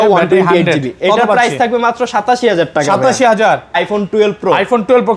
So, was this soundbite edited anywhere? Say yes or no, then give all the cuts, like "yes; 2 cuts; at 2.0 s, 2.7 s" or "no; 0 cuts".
yes; 1 cut; at 3.8 s